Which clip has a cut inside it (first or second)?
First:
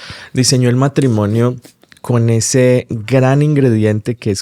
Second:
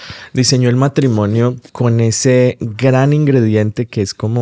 second